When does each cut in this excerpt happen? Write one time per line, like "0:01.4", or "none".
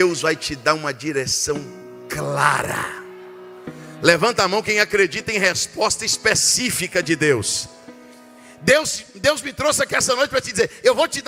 none